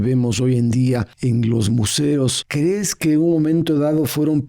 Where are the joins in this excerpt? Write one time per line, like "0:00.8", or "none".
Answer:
0:01.1
0:02.4